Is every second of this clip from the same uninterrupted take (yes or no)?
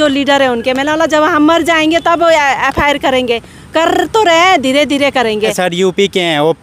no